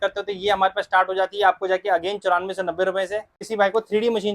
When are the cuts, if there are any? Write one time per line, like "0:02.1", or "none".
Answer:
0:03.4

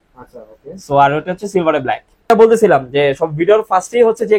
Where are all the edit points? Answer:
none

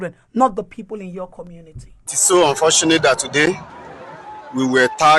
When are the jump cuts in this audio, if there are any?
0:02.1

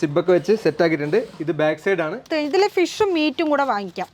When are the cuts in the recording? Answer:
0:02.3

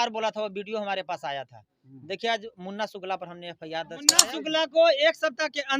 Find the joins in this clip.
0:04.2

